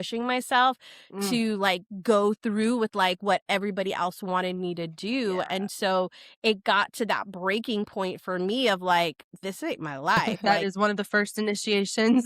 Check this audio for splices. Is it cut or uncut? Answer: cut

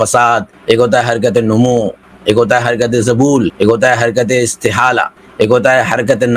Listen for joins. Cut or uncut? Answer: cut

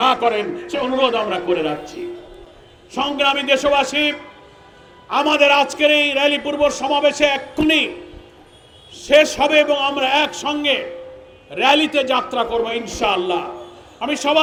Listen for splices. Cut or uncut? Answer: uncut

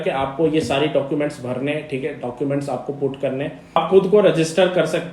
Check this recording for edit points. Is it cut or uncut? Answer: cut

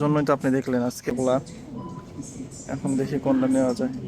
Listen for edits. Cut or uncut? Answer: cut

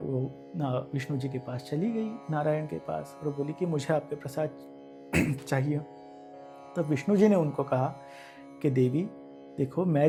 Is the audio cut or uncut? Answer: uncut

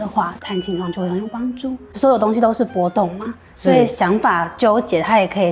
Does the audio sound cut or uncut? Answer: cut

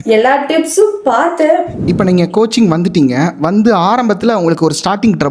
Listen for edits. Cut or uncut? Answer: cut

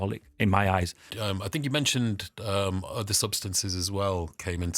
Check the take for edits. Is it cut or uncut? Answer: cut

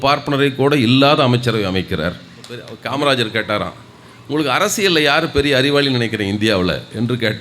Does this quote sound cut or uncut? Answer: cut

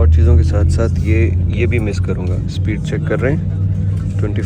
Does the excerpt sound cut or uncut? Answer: uncut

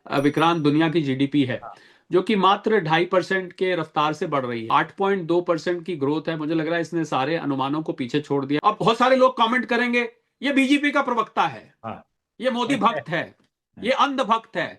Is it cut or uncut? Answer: cut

